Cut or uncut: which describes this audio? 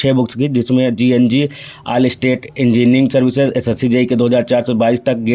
uncut